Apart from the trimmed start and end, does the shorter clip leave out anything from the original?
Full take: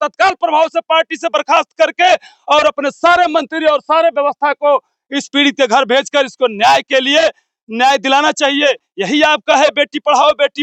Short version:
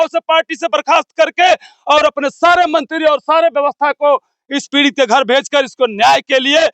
no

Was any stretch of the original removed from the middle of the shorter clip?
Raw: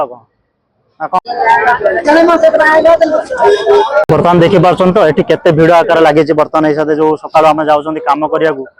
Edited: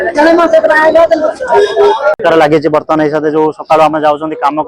yes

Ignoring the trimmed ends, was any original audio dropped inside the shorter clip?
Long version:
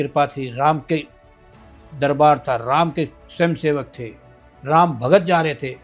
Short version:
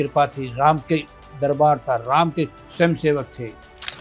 yes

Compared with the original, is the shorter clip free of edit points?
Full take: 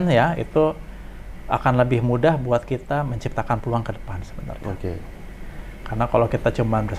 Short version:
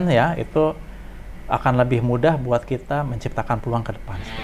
yes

